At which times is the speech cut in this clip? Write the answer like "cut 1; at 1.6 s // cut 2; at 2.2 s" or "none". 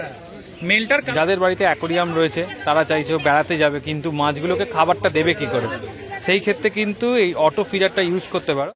cut 1; at 1.1 s